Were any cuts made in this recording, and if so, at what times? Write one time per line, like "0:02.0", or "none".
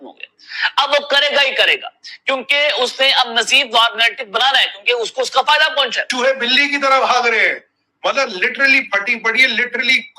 0:06.1